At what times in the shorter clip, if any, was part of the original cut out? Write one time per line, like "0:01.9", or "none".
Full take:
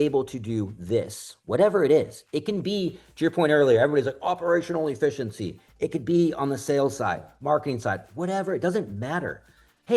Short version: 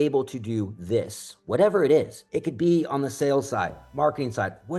0:02.2